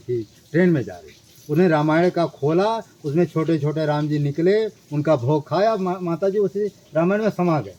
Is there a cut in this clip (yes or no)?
no